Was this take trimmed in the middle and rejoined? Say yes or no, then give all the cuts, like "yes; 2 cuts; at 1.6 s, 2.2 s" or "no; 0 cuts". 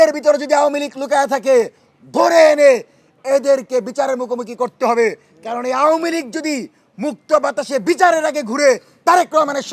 no; 0 cuts